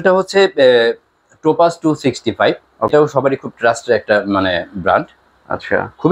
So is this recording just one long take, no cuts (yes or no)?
no